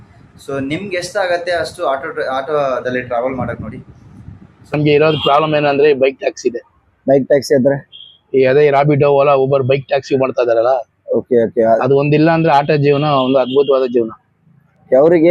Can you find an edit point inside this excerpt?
yes; 1 cut; at 4.7 s

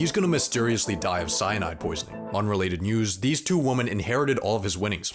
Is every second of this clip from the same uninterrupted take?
no; 1 cut; at 2.3 s

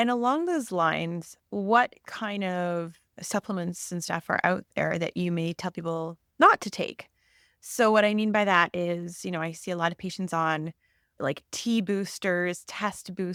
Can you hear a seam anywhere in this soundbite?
no; 0 cuts

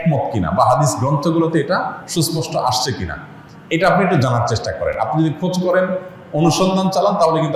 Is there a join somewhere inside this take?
no; 0 cuts

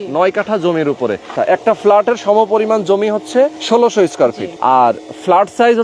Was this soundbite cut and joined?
yes; 3 cuts; at 1.3 s, 3.6 s, 4.5 s

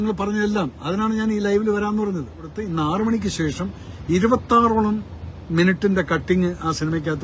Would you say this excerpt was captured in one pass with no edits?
no; 1 cut; at 2.6 s

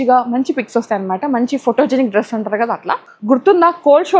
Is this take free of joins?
no; 1 cut; at 3.1 s

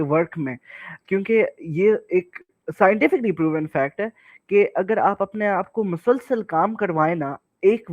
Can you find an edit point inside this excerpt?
no; 0 cuts

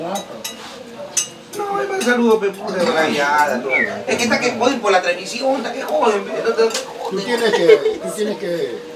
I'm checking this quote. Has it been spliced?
no; 0 cuts

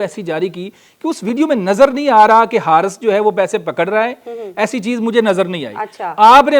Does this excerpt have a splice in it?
no; 0 cuts

